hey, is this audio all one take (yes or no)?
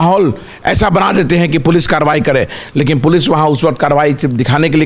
yes